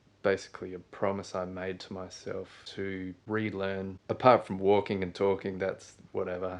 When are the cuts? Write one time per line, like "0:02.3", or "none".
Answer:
0:02.6
0:04.0